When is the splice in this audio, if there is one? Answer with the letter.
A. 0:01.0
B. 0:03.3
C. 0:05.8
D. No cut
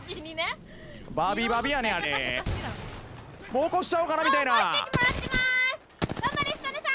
B